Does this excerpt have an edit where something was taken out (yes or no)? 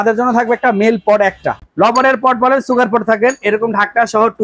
yes